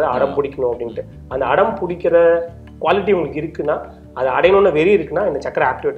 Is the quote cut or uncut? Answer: uncut